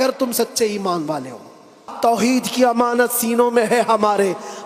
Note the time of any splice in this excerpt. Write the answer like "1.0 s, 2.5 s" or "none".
1.8 s